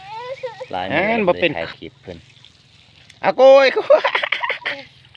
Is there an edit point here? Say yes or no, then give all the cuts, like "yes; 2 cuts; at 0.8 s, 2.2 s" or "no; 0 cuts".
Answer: yes; 1 cut; at 1.6 s